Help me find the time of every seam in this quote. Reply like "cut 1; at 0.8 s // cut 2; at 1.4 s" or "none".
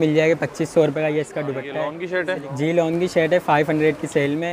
cut 1; at 2.0 s